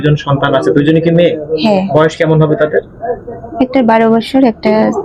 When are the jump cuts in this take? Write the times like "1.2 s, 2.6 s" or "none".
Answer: none